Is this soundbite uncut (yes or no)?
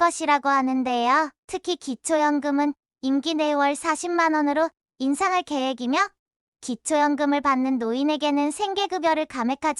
yes